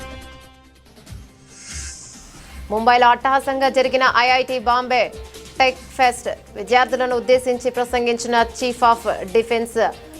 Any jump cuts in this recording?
no; 0 cuts

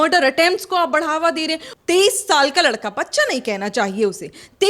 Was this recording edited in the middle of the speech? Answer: yes; 1 cut; at 1.7 s

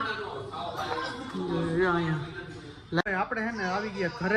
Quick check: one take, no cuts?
no; 1 cut; at 3.1 s

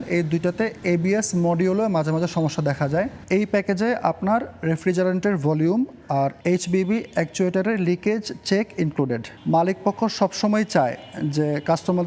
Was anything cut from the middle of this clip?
yes; 2 cuts; at 3.2 s, 9.3 s

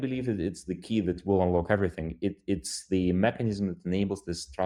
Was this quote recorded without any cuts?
yes; 0 cuts

